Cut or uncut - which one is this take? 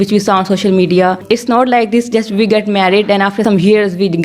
cut